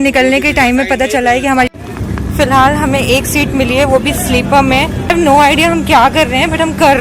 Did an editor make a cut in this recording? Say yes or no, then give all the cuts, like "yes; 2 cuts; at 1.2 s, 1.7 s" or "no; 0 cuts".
yes; 2 cuts; at 1.7 s, 5.1 s